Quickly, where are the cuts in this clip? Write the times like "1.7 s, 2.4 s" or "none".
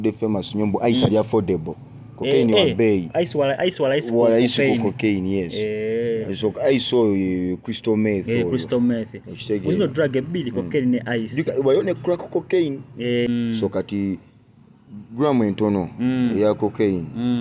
13.3 s